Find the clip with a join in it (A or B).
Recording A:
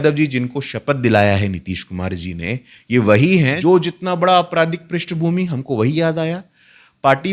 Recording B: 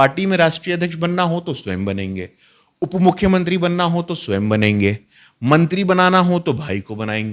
A